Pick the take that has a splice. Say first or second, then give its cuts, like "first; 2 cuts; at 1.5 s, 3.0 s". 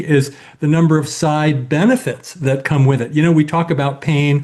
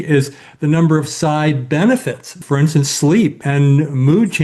second; 2 cuts; at 2.3 s, 3.4 s